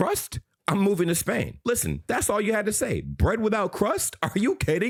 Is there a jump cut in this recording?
no; 0 cuts

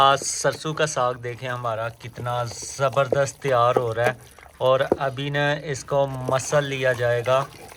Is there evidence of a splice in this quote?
no; 0 cuts

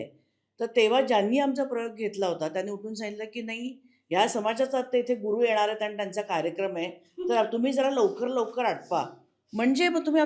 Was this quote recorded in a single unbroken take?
yes; 0 cuts

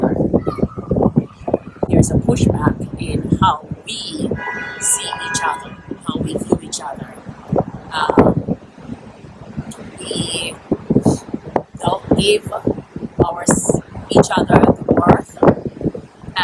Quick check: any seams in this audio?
yes; 1 cut; at 1.9 s

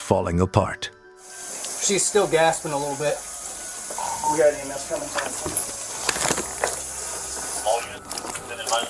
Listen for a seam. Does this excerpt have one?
no; 0 cuts

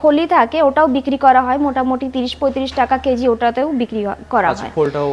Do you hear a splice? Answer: no; 0 cuts

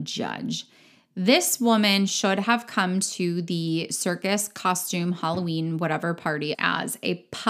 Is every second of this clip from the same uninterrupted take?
no; 1 cut; at 6.6 s

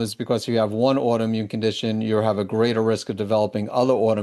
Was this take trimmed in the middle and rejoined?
no; 0 cuts

